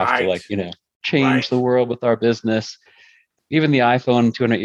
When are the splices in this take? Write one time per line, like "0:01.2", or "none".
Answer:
0:03.2